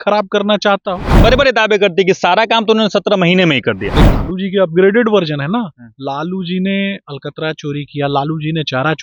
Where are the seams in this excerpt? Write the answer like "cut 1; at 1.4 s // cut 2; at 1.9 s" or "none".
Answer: cut 1; at 1.2 s // cut 2; at 4.0 s